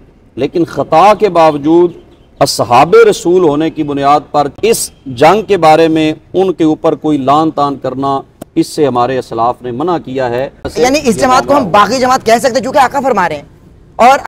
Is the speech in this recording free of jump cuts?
no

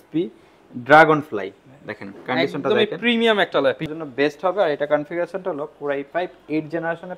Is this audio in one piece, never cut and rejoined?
no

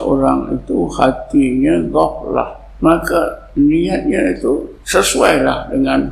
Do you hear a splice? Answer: yes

